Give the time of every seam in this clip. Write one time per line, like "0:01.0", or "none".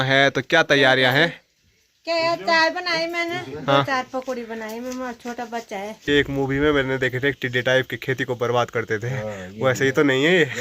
0:06.1